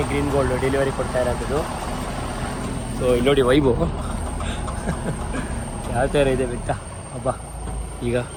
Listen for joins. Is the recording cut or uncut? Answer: uncut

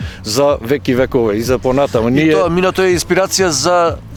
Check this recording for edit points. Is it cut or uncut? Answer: uncut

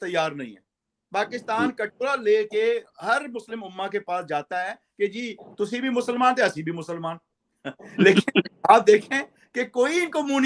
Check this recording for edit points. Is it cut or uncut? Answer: uncut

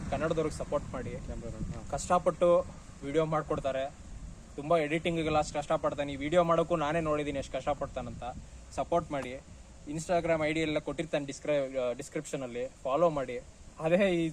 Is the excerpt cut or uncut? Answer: uncut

